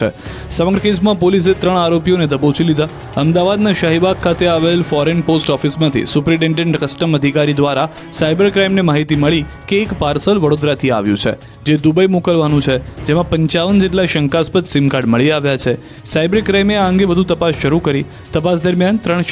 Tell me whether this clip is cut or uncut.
uncut